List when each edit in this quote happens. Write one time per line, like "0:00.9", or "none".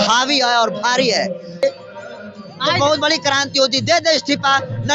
0:01.6